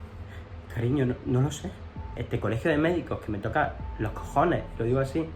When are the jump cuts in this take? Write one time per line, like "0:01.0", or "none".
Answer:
0:02.2